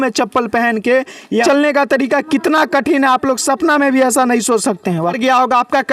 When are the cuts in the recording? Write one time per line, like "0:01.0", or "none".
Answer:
0:01.4
0:05.2

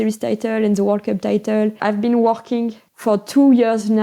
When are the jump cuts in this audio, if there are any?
0:01.8
0:02.9

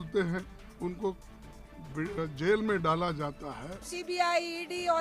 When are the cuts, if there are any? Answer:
0:03.9

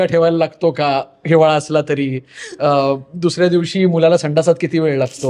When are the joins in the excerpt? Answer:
none

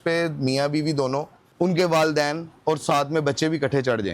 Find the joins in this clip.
0:01.4

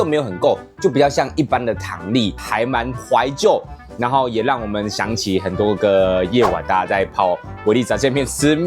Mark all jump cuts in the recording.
0:02.4

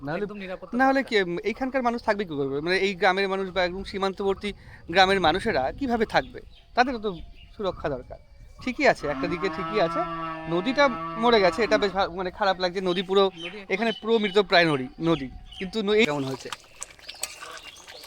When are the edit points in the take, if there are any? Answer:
0:16.0

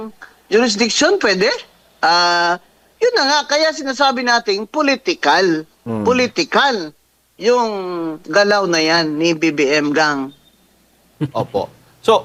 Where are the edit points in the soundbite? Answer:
none

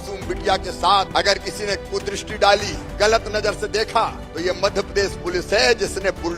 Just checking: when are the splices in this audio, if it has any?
0:01.1
0:02.8
0:04.2

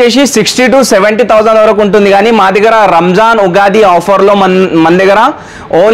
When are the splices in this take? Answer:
none

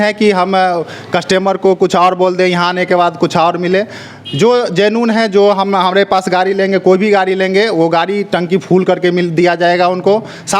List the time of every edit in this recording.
none

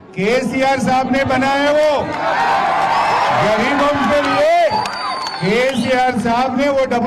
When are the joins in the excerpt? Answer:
none

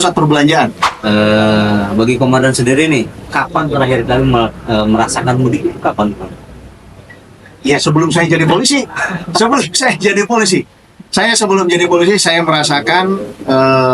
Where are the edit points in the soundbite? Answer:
0:00.9

